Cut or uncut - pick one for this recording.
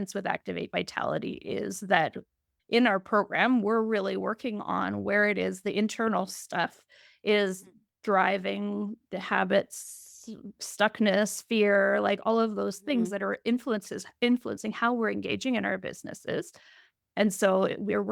uncut